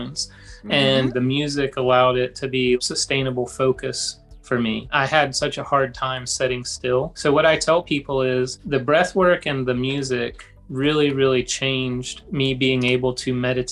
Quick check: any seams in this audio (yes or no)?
yes